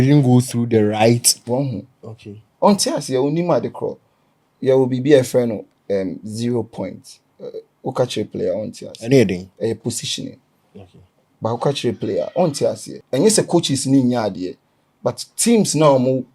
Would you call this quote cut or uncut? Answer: cut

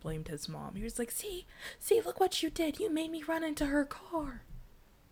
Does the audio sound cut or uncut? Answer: uncut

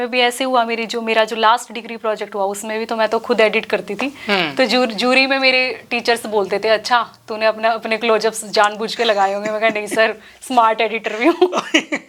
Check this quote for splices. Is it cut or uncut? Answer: uncut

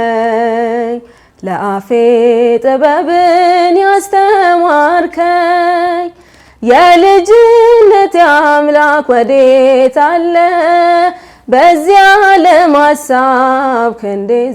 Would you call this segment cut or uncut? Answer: uncut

